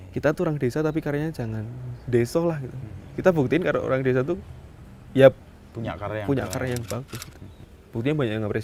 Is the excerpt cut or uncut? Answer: uncut